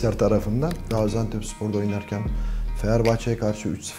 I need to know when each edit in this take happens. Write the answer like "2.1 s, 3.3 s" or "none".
0.9 s